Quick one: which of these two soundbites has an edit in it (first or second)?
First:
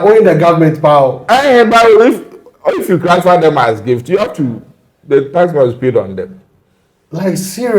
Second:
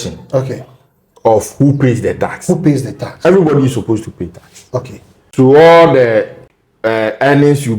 second